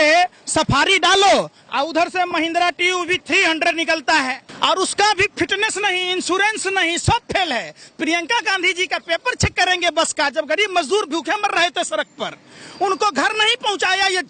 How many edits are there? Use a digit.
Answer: 1